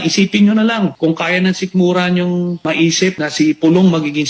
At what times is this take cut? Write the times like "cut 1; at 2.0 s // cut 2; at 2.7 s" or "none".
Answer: cut 1; at 0.9 s // cut 2; at 3.0 s